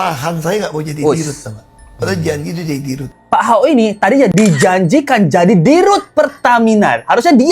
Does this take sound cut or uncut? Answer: cut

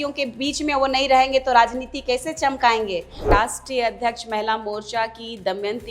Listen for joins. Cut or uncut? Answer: cut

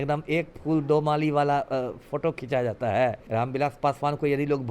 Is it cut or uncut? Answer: cut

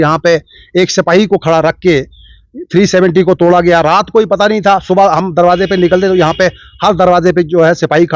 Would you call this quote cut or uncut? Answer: uncut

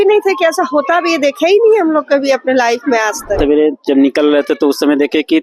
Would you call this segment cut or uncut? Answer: cut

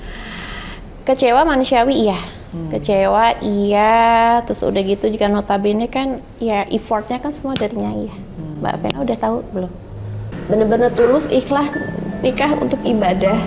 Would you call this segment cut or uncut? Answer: cut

